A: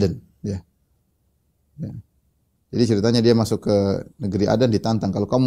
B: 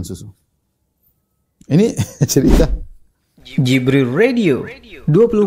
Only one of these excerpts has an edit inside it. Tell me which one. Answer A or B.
B